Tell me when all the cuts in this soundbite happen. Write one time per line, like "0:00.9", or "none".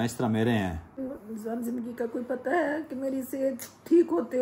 0:01.1